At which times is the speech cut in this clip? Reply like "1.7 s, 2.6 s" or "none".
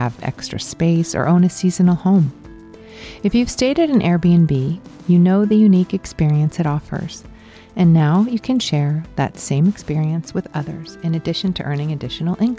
none